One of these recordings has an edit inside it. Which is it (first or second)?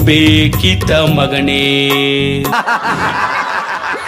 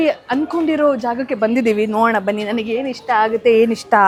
first